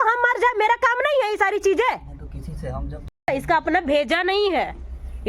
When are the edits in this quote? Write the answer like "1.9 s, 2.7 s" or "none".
3.3 s